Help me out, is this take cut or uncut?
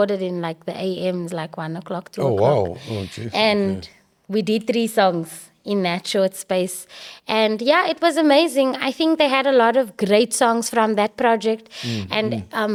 uncut